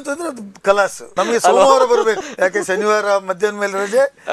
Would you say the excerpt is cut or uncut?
cut